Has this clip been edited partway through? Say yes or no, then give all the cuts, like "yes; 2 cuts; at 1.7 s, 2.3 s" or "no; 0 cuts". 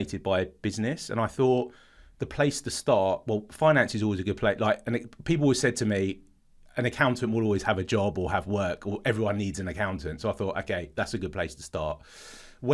no; 0 cuts